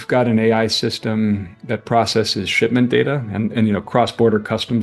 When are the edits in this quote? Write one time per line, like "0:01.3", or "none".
none